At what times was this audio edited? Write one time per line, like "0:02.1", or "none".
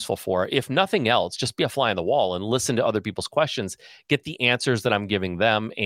none